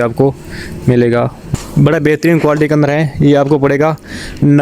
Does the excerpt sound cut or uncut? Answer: cut